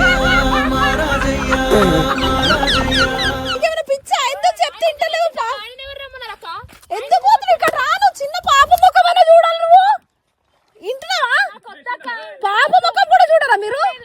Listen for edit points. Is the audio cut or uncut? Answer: cut